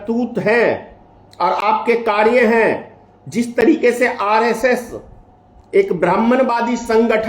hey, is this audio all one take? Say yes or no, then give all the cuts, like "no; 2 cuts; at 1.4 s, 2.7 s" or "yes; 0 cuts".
yes; 0 cuts